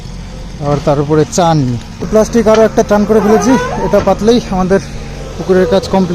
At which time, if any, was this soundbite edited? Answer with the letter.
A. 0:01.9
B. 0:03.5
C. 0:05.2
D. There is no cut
A